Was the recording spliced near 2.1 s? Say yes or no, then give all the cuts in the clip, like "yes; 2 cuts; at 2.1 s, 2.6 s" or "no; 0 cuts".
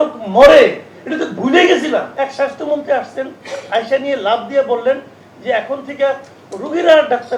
yes; 1 cut; at 2.1 s